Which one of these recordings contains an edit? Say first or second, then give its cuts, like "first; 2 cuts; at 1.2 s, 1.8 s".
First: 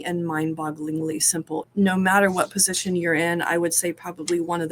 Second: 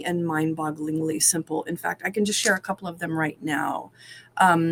first; 1 cut; at 1.7 s